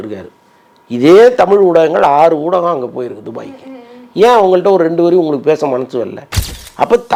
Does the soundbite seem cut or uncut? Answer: uncut